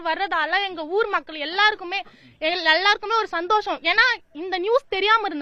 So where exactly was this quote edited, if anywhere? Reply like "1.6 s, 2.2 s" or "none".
none